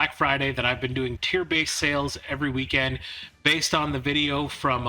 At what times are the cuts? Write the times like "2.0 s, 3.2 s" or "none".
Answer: 1.2 s